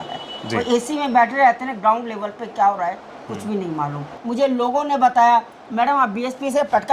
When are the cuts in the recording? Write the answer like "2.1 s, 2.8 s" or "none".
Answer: 4.2 s